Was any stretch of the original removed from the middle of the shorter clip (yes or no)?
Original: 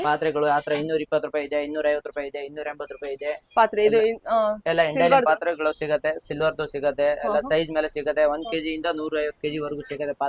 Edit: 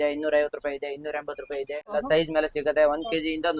yes